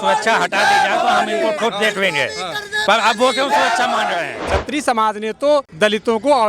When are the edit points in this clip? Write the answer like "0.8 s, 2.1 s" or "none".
4.3 s, 5.7 s